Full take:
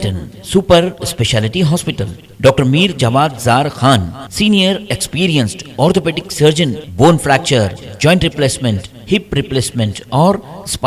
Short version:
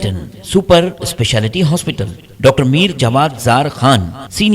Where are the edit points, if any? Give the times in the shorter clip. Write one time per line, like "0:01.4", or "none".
none